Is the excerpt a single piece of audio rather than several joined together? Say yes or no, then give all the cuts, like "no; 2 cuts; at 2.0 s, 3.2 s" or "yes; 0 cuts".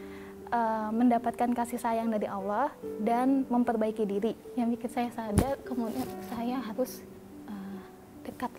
no; 2 cuts; at 4.4 s, 7.5 s